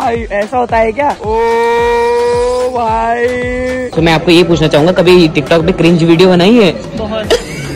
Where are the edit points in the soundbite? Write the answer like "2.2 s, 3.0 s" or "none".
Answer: 1.2 s, 3.9 s